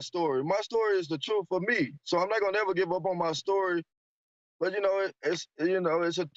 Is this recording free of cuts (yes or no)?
yes